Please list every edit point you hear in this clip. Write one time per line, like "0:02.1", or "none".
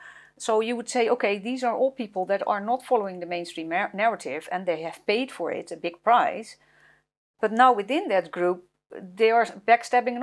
none